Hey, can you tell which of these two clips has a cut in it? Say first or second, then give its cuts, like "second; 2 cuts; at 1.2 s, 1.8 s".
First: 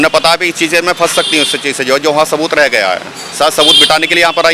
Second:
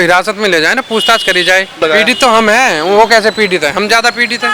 second; 1 cut; at 1.8 s